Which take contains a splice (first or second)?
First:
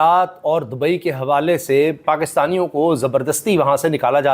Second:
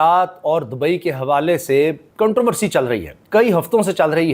first